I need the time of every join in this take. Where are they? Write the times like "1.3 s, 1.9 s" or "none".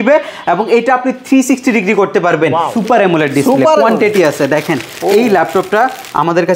2.7 s